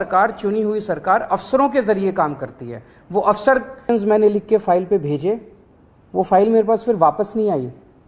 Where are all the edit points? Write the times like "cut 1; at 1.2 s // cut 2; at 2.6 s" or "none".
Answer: cut 1; at 3.8 s